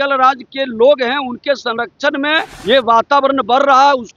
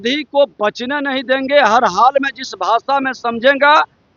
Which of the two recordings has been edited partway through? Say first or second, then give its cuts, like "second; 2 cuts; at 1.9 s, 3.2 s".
first; 1 cut; at 2.5 s